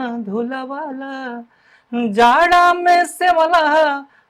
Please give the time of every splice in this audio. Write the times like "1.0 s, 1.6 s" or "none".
none